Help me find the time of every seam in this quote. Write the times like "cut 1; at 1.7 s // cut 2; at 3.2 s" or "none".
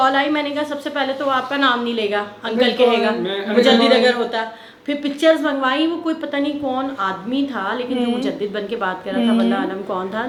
none